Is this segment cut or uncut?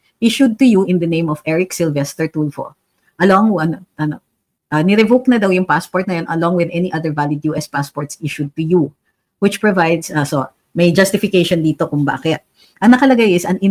uncut